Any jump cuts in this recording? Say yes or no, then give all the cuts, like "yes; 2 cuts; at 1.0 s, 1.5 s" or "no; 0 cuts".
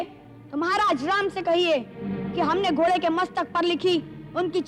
no; 0 cuts